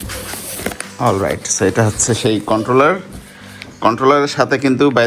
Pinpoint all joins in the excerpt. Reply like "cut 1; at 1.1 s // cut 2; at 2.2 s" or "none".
none